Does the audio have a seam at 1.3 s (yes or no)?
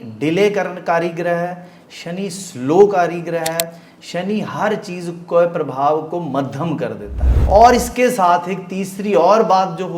no